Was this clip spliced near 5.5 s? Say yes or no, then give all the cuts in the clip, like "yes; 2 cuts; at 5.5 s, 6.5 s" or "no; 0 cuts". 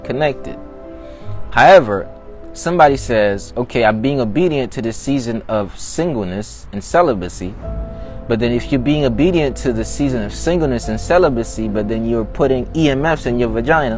no; 0 cuts